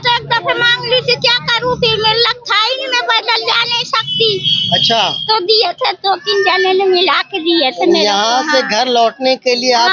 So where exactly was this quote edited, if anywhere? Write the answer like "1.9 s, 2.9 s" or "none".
none